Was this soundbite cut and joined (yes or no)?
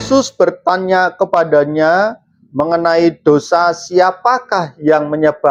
no